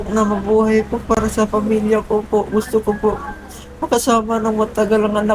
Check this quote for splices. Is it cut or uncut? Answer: uncut